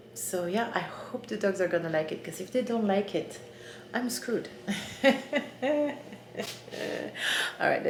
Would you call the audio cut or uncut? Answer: uncut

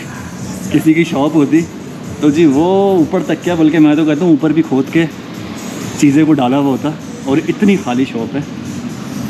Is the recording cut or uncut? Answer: uncut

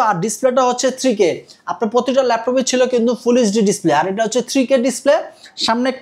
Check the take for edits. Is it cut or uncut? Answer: uncut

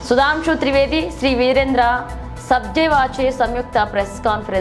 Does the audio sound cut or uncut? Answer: uncut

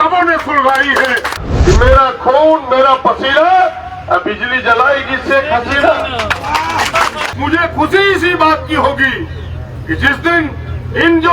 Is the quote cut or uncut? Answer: cut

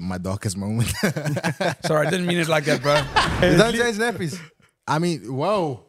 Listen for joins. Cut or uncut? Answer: cut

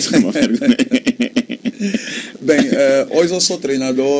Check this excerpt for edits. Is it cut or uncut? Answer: uncut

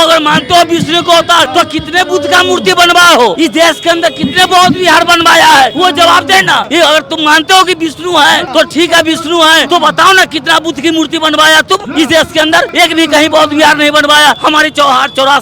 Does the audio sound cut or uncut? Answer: cut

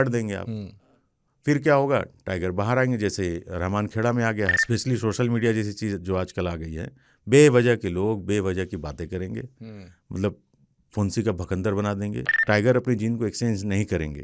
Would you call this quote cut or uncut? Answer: cut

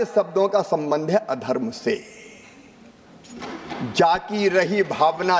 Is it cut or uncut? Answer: uncut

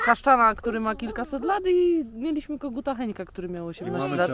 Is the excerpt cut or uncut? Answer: uncut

